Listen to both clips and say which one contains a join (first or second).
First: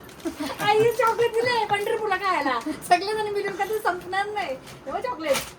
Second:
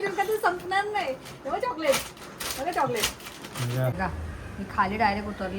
second